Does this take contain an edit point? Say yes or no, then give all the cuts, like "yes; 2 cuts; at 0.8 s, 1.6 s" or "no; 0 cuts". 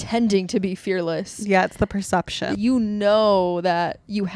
yes; 1 cut; at 2.5 s